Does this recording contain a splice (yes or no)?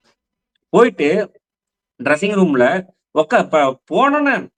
no